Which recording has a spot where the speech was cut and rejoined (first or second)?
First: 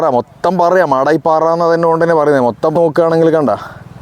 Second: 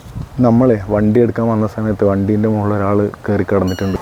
first